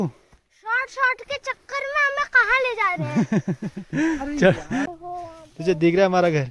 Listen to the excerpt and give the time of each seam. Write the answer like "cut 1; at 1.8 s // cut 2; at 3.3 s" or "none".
cut 1; at 4.9 s